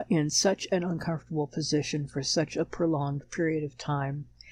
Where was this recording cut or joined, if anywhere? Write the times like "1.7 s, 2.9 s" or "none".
none